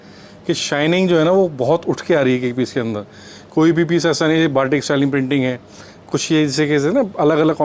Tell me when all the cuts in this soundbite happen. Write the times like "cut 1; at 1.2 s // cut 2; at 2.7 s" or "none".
none